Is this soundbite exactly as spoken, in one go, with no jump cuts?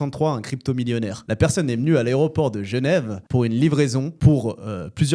yes; 0 cuts

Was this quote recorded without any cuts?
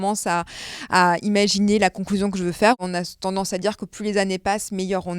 no; 1 cut; at 2.8 s

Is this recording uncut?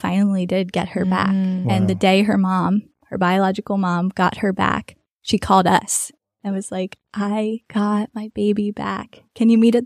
yes; 0 cuts

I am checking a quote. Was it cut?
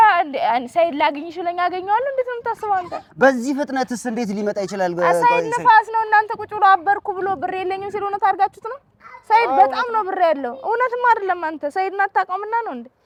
no; 0 cuts

